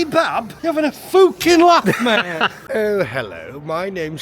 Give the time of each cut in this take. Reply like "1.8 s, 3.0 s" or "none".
2.5 s